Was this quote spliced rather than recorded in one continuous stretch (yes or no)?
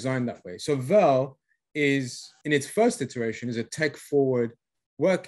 yes